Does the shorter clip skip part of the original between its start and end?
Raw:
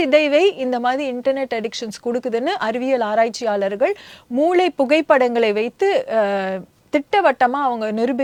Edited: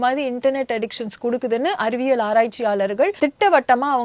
yes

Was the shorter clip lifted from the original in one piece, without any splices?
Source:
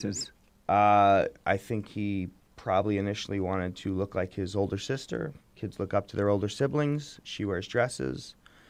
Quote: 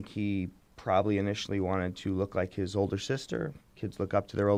yes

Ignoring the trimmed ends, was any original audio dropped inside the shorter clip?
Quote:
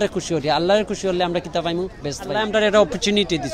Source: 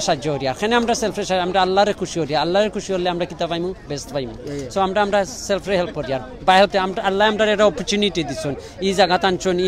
yes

